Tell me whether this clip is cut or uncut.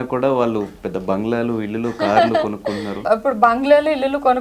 cut